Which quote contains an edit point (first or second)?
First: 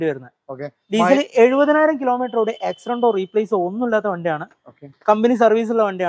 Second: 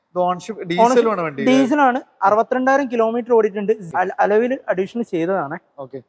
second